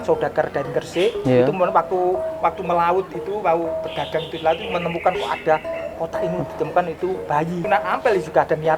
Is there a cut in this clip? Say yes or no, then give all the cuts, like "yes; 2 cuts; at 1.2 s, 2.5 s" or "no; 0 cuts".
yes; 1 cut; at 7.6 s